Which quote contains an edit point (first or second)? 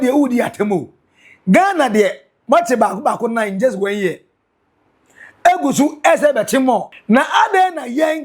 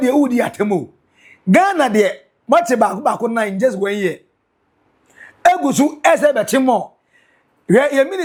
first